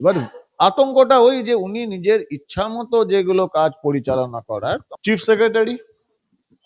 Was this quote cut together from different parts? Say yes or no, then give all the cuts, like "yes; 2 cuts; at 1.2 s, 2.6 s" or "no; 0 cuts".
yes; 1 cut; at 4.7 s